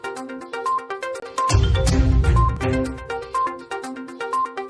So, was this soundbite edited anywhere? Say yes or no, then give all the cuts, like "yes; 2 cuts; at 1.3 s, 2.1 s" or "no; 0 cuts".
no; 0 cuts